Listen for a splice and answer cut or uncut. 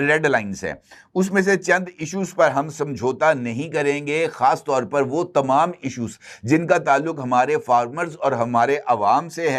uncut